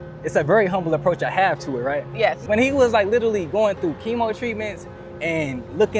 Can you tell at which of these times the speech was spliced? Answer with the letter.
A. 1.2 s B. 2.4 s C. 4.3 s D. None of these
B